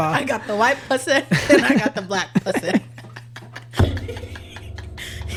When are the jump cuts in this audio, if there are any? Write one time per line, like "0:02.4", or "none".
none